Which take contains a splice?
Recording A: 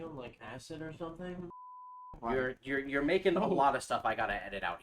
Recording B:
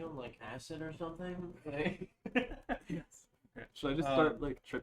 A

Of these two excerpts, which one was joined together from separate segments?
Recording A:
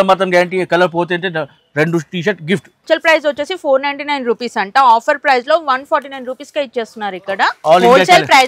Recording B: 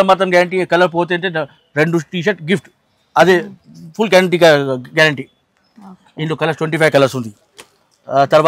A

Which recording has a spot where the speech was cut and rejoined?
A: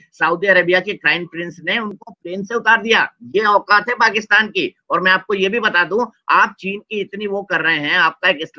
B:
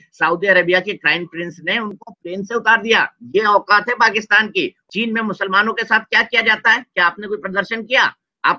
B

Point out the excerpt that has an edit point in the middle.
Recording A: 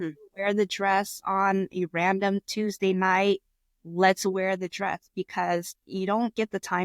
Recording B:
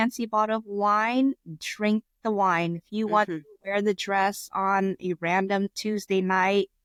A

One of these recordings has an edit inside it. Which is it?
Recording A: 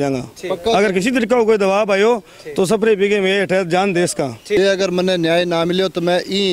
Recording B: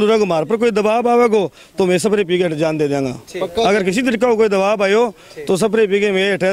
A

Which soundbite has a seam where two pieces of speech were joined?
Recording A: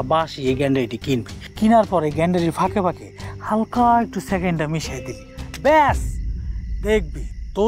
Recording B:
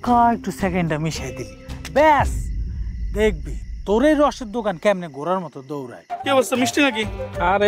B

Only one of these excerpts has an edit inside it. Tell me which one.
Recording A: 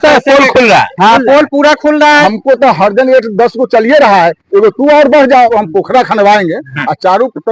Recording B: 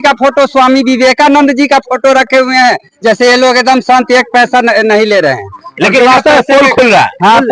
A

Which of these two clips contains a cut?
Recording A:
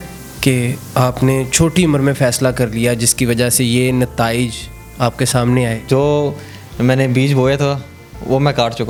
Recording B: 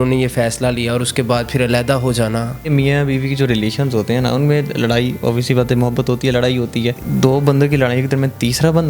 B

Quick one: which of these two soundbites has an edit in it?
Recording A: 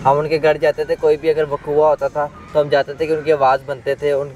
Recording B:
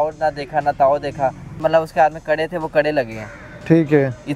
B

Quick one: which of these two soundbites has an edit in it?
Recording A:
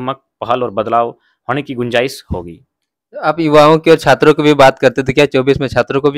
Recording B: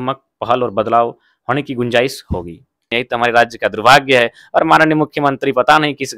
B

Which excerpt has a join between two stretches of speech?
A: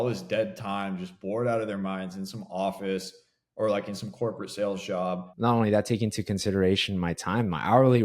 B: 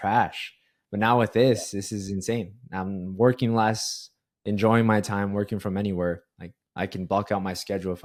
A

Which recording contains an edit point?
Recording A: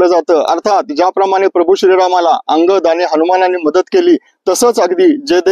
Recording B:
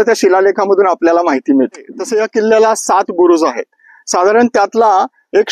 B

